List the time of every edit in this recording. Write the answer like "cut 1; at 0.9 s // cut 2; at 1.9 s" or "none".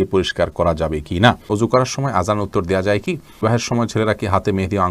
cut 1; at 1.4 s // cut 2; at 3.4 s